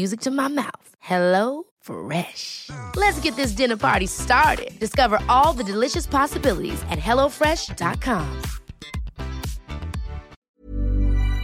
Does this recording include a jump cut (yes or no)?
yes